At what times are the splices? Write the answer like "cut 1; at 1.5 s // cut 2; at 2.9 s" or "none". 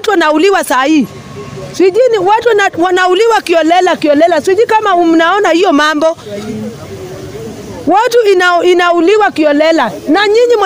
none